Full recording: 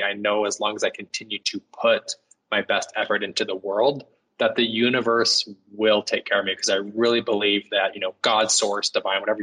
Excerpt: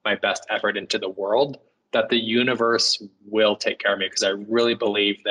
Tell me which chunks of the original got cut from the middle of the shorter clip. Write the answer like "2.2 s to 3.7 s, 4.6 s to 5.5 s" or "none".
none